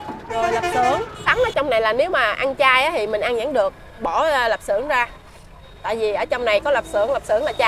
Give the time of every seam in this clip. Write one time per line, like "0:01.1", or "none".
0:01.3